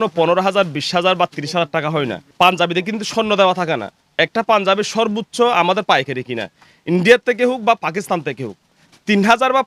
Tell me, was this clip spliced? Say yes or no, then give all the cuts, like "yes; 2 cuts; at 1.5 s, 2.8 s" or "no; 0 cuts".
no; 0 cuts